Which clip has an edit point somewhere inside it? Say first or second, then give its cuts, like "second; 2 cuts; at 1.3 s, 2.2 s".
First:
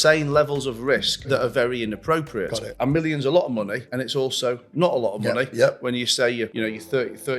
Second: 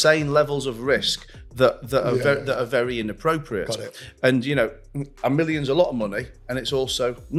first; 4 cuts; at 1.2 s, 2.7 s, 3.8 s, 6.5 s